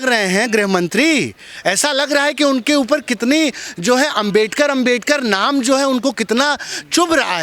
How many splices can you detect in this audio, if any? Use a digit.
0